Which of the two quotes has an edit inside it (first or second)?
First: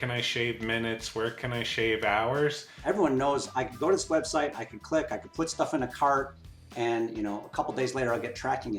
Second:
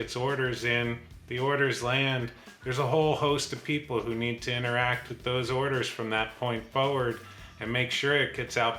first